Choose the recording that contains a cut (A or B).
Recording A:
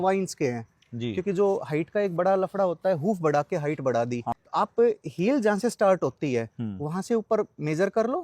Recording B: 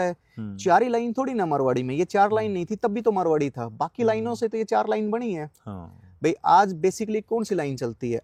A